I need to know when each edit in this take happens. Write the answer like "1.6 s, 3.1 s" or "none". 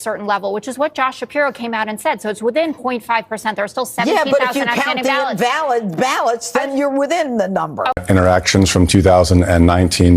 8.0 s